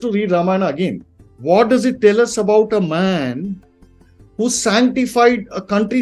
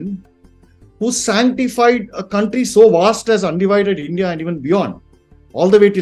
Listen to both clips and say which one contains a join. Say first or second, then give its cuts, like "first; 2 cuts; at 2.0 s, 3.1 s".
first; 1 cut; at 1.1 s